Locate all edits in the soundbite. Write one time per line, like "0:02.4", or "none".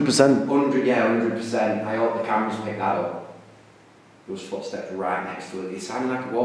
none